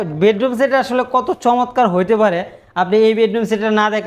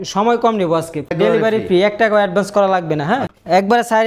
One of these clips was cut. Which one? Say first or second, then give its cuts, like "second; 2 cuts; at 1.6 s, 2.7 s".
second; 2 cuts; at 1.1 s, 3.3 s